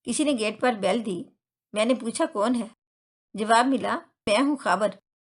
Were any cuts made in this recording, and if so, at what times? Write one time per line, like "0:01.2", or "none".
0:04.3